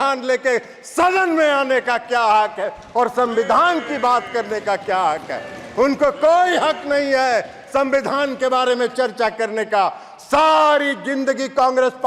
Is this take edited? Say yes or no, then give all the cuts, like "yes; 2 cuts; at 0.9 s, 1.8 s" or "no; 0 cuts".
no; 0 cuts